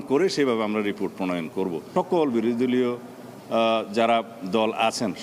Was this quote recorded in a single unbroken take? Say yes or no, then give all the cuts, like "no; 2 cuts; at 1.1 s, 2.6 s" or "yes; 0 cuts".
no; 1 cut; at 1.9 s